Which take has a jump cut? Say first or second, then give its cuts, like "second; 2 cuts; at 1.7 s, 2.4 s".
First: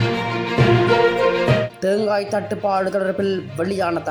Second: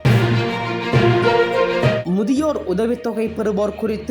second; 1 cut; at 2.0 s